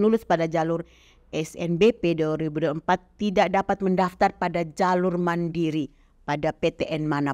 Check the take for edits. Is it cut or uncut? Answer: uncut